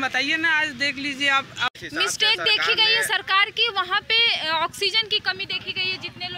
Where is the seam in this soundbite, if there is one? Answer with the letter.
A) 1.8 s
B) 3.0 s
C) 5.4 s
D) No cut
A